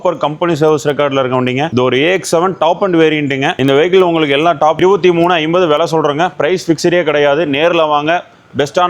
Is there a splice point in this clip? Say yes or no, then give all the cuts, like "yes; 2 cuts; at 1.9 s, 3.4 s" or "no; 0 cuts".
yes; 1 cut; at 4.7 s